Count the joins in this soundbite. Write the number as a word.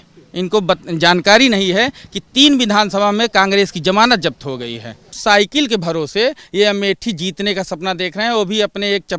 one